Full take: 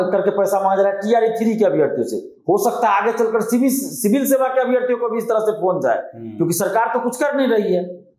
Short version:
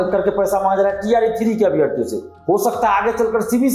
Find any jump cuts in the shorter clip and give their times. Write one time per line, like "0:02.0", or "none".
none